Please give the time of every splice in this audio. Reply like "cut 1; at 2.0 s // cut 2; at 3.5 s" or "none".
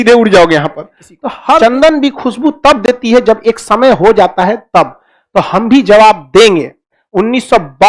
cut 1; at 1.6 s